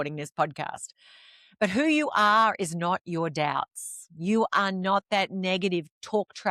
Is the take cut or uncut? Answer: uncut